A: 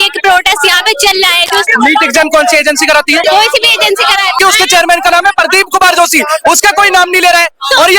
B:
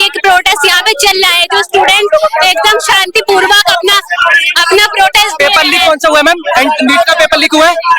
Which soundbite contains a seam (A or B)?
A